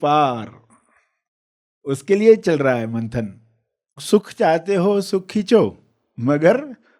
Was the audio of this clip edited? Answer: yes; 1 cut; at 4.0 s

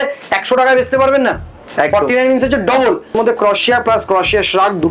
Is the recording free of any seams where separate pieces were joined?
no; 1 cut; at 3.2 s

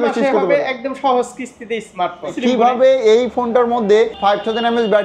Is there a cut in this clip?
yes; 2 cuts; at 2.4 s, 4.1 s

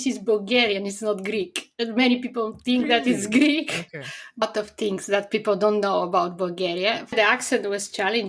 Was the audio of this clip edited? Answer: yes; 2 cuts; at 4.4 s, 7.1 s

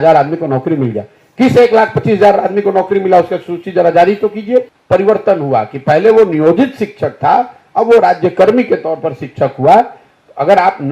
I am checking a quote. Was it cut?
yes; 1 cut; at 4.8 s

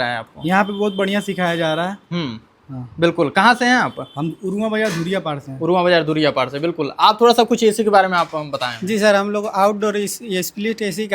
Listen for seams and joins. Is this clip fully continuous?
yes; 0 cuts

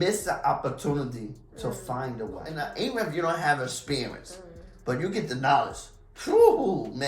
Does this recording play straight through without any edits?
no; 1 cut; at 2.5 s

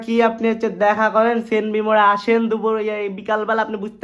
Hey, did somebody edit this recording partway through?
no; 0 cuts

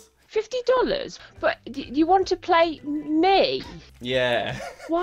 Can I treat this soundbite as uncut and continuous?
no; 1 cut; at 1.1 s

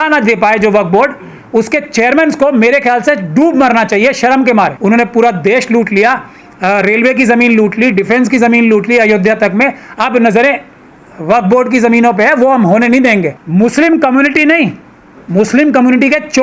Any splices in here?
yes; 2 cuts; at 4.8 s, 13.4 s

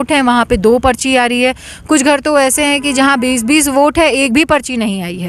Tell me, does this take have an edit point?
no; 0 cuts

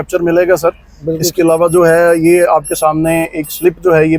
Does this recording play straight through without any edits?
yes; 0 cuts

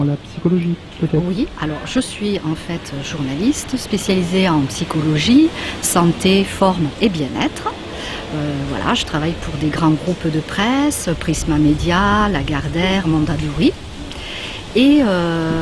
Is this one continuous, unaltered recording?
yes; 0 cuts

